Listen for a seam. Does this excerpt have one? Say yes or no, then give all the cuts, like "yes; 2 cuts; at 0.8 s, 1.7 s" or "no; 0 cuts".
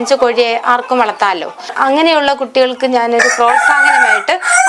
yes; 1 cut; at 1.7 s